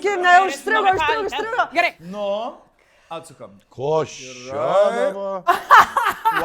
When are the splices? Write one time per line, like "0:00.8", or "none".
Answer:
0:02.0